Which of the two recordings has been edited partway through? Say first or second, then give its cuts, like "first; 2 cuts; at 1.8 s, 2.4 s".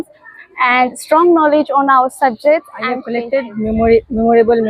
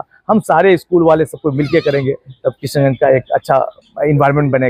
first; 1 cut; at 3.1 s